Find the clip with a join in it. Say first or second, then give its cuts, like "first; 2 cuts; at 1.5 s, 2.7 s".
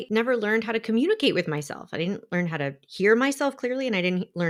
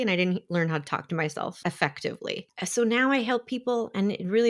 second; 2 cuts; at 1.6 s, 2.5 s